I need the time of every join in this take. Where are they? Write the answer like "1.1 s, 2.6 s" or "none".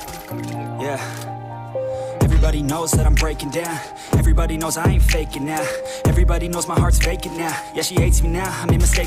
none